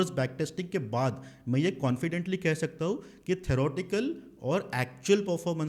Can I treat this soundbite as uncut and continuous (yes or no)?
yes